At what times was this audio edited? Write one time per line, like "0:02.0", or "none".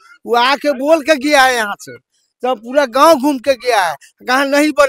none